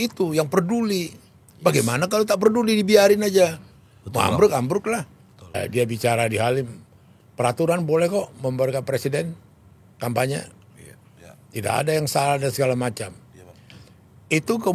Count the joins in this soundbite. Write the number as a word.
one